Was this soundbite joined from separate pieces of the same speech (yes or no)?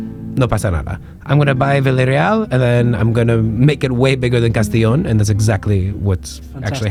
no